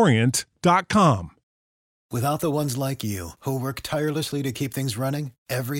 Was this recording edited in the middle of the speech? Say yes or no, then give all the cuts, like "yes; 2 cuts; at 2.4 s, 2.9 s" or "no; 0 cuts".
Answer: yes; 1 cut; at 1.4 s